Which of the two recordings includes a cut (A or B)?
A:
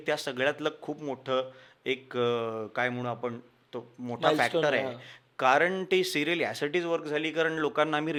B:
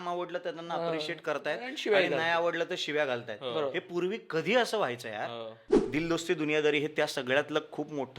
B